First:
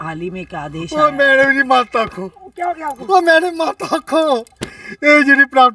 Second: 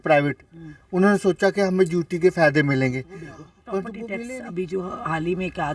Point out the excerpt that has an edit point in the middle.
second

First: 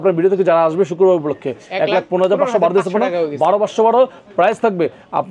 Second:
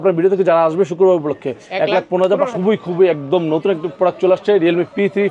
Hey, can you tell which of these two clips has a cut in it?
second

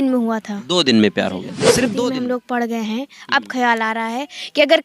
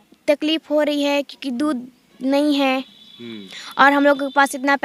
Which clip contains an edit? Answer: first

